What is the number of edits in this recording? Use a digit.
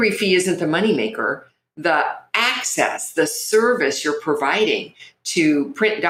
0